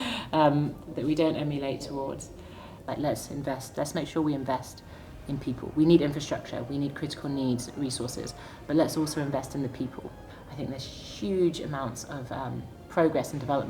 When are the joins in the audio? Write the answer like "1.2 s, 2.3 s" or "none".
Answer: 2.8 s, 10.2 s

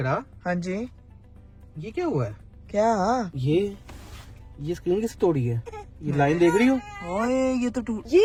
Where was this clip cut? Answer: none

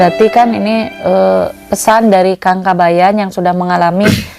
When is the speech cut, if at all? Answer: none

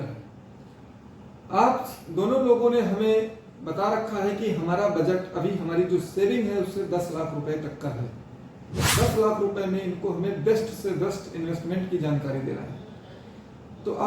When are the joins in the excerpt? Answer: 8.9 s

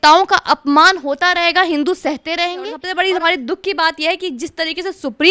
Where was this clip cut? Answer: 2.8 s

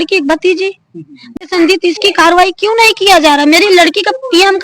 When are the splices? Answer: 1.3 s

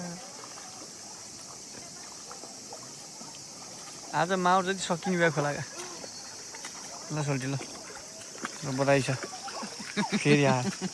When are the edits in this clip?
none

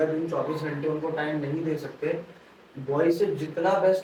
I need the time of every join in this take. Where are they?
none

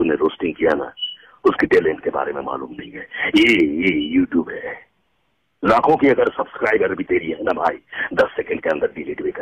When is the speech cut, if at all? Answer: none

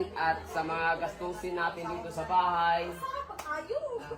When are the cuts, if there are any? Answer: none

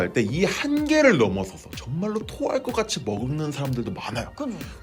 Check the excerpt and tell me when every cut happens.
none

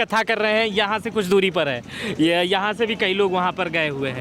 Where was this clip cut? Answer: none

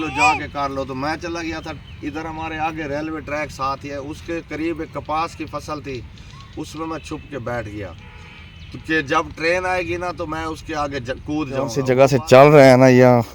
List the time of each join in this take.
11.8 s

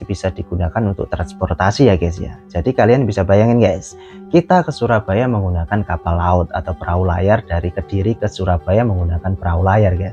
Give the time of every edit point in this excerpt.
none

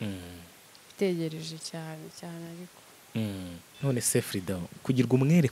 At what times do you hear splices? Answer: 3.6 s

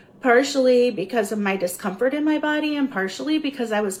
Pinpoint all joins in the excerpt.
none

